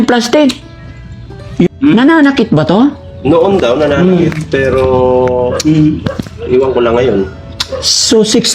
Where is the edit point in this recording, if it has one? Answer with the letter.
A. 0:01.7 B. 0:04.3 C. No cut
A